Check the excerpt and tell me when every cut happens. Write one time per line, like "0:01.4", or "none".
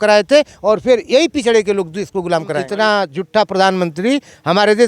0:02.6